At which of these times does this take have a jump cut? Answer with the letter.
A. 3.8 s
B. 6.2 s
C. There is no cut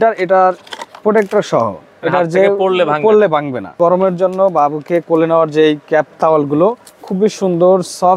A